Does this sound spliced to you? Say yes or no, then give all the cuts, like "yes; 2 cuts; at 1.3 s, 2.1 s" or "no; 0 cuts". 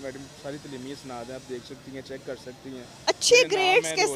no; 0 cuts